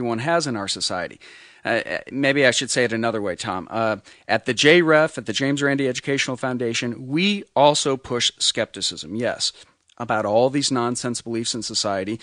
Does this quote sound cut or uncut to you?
uncut